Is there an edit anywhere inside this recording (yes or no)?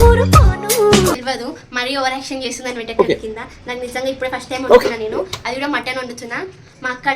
yes